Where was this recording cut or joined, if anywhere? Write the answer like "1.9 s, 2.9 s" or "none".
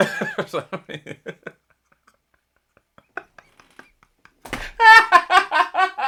none